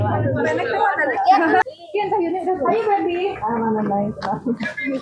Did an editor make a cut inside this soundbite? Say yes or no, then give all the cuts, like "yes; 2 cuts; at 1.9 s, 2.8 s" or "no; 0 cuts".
yes; 1 cut; at 1.7 s